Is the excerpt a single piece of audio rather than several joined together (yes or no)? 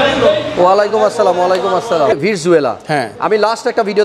no